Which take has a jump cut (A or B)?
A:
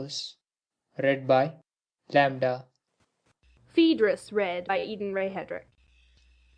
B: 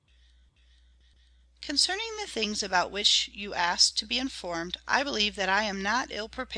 B